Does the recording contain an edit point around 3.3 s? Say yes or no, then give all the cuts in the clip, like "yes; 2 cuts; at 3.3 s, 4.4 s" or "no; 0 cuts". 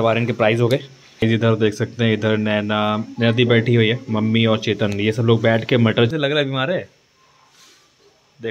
no; 2 cuts; at 1.2 s, 6.1 s